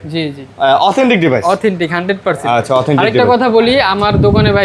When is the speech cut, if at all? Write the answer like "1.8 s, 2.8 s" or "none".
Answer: none